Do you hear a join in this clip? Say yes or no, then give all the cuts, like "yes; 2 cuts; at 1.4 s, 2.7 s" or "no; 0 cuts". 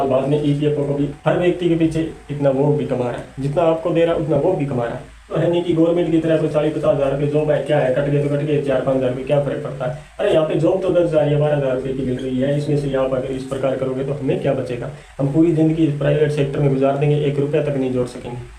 yes; 2 cuts; at 1.1 s, 5.3 s